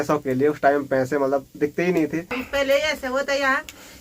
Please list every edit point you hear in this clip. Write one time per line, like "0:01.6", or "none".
0:02.4